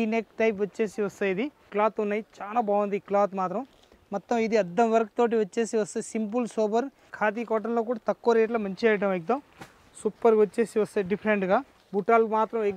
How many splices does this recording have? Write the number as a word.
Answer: three